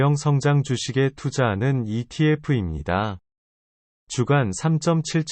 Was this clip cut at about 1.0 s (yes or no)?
yes